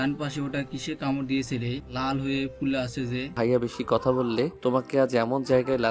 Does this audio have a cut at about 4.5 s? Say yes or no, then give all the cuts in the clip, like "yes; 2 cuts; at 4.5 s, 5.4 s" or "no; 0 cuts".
yes; 3 cuts; at 1.9 s, 3.3 s, 4.5 s